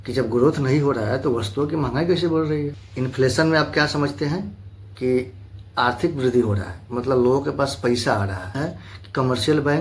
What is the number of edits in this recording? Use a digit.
2